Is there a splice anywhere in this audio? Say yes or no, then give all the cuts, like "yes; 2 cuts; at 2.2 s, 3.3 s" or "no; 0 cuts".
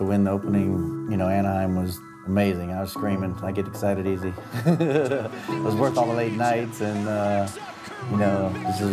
yes; 2 cuts; at 1.0 s, 2.1 s